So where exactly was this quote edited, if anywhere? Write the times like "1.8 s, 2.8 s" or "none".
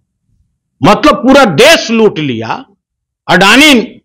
none